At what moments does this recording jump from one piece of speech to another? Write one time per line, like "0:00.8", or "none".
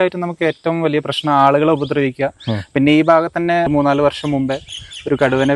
0:03.7